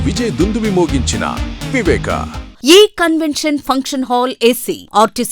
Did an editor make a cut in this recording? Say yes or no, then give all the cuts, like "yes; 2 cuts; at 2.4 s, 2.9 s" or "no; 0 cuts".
yes; 1 cut; at 2.4 s